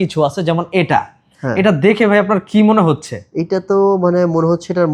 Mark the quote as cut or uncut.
uncut